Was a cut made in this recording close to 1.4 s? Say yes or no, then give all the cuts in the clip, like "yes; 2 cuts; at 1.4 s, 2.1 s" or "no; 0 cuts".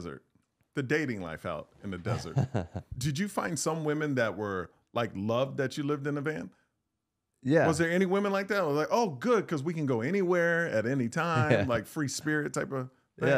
no; 1 cut; at 3.0 s